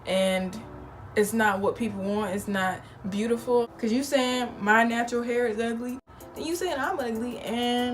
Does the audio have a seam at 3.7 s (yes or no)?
yes